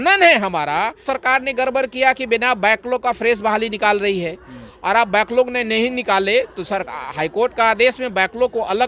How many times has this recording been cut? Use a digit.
1